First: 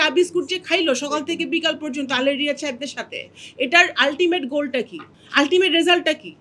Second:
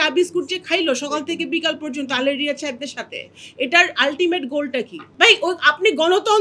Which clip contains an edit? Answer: second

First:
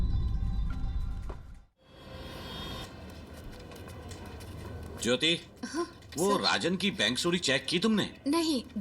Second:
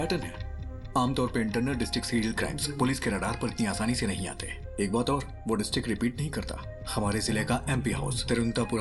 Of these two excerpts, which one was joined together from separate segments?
first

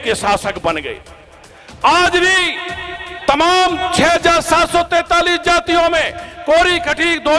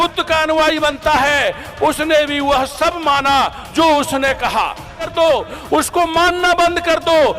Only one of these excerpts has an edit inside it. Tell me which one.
second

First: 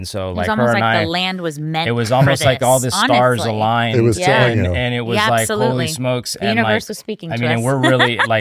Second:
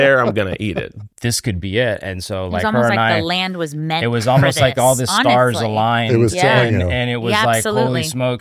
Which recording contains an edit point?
second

